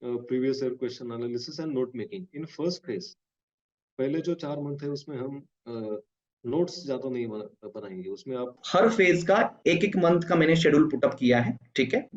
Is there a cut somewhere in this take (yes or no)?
yes